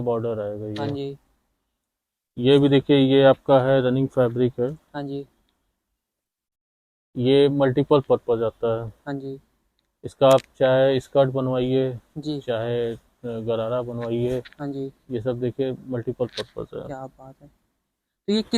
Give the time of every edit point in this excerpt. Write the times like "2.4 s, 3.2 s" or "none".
none